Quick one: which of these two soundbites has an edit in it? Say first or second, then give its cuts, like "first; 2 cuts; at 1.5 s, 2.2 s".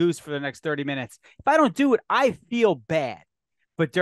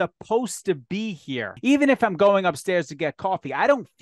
second; 1 cut; at 1.5 s